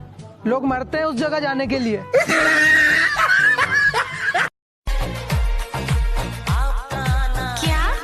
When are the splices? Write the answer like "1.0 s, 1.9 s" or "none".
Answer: 4.6 s